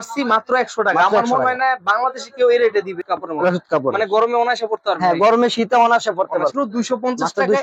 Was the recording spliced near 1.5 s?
no; 2 cuts; at 3.0 s, 6.5 s

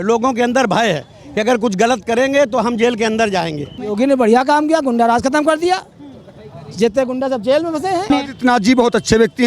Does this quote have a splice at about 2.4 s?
no; 2 cuts; at 3.8 s, 8.1 s

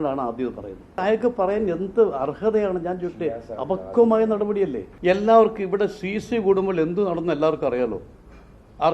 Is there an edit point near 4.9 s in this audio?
yes; 2 cuts; at 1.0 s, 4.9 s

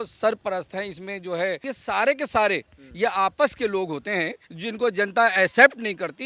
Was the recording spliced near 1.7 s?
yes; 2 cuts; at 1.7 s, 4.4 s

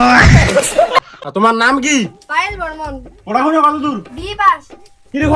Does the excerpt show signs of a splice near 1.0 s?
yes; 1 cut; at 1.0 s

